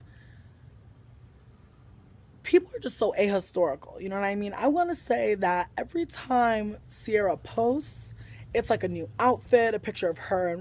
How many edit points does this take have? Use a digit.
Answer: 0